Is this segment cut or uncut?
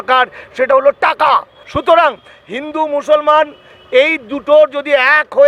uncut